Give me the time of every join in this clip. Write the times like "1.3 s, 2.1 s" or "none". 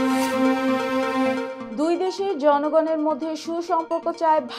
none